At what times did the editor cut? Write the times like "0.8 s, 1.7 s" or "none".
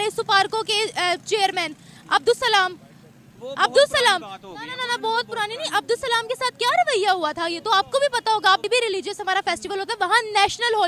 8.6 s